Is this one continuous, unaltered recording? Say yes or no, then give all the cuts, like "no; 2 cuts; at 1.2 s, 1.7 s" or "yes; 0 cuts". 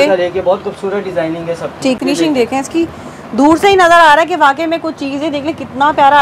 no; 1 cut; at 2.0 s